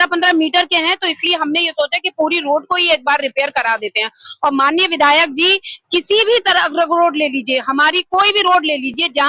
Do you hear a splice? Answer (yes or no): no